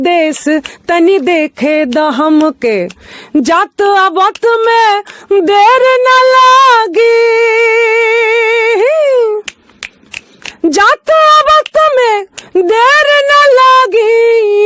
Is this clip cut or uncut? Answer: uncut